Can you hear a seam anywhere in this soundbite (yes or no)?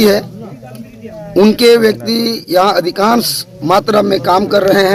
no